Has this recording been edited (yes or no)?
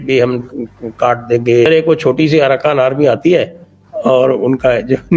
yes